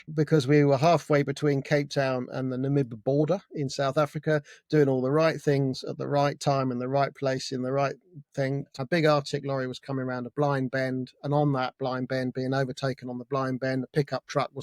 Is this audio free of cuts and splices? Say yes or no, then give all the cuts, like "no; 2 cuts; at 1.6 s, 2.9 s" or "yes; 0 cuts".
no; 1 cut; at 8.7 s